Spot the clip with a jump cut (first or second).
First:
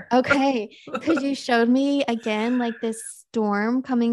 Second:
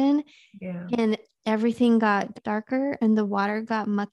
second